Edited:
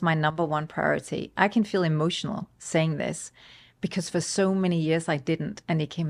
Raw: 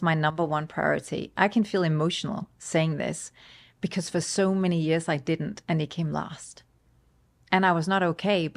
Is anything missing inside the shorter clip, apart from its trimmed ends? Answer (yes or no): no